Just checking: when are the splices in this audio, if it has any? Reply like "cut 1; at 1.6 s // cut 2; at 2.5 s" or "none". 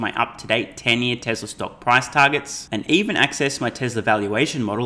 none